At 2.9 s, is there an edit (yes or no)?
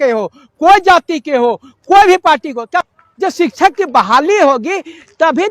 yes